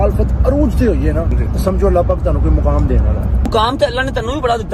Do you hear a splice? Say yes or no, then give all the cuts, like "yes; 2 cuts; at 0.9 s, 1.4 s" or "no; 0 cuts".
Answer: yes; 2 cuts; at 1.4 s, 3.5 s